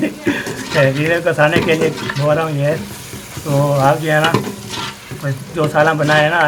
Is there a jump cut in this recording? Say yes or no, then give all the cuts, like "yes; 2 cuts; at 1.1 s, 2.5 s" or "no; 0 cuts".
no; 0 cuts